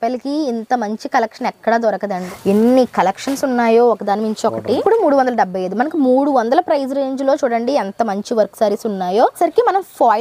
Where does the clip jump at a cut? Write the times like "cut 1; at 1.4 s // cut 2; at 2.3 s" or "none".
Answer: cut 1; at 2.2 s // cut 2; at 4.8 s // cut 3; at 9.4 s